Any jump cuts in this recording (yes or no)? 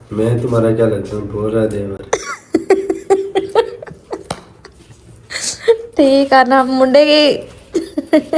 no